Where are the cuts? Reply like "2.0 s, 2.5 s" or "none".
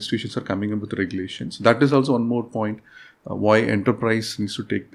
none